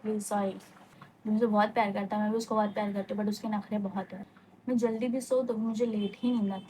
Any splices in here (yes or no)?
yes